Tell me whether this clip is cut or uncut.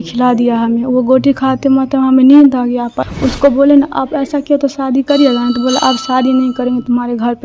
cut